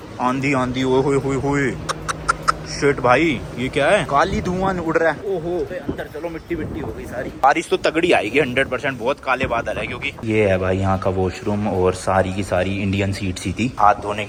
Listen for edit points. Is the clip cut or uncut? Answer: uncut